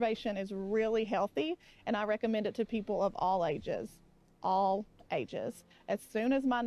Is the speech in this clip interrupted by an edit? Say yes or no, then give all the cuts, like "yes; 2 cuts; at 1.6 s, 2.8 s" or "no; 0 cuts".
no; 0 cuts